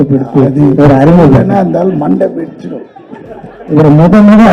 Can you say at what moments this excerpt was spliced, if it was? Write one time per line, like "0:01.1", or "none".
none